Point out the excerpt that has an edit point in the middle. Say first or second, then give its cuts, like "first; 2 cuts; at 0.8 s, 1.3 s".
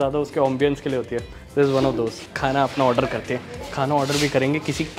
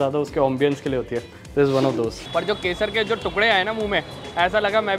second; 1 cut; at 2.2 s